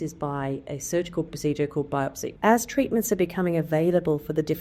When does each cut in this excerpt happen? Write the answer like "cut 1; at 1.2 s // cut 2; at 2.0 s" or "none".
cut 1; at 2.2 s

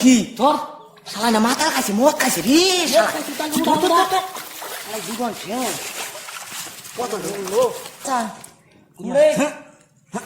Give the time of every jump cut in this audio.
cut 1; at 8.1 s

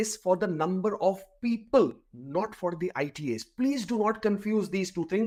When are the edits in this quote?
none

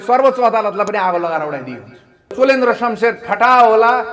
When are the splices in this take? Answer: cut 1; at 2.3 s

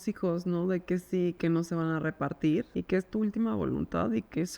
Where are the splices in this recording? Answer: cut 1; at 1.4 s // cut 2; at 2.7 s

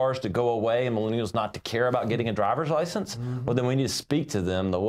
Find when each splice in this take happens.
none

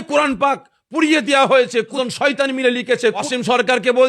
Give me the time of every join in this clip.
cut 1; at 1.9 s // cut 2; at 3.2 s

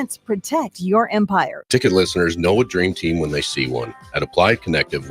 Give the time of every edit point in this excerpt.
cut 1; at 1.6 s

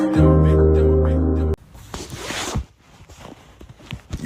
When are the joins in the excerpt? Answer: cut 1; at 1.5 s

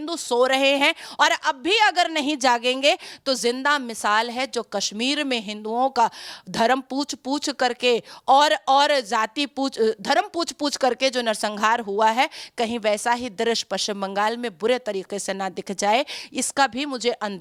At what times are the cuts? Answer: none

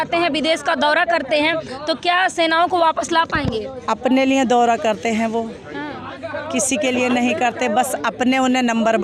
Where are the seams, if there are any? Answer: none

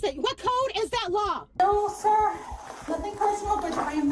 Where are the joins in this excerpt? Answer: cut 1; at 1.5 s

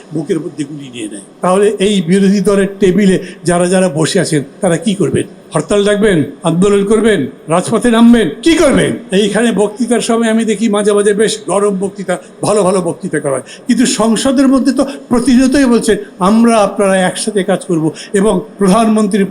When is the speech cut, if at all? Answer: cut 1; at 1.2 s // cut 2; at 5.4 s // cut 3; at 6.3 s // cut 4; at 7.3 s // cut 5; at 9.0 s

